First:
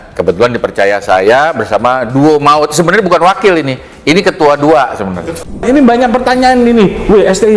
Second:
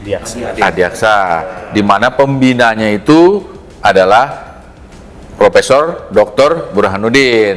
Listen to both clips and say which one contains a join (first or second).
first